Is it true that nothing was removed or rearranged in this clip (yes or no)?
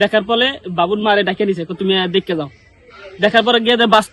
yes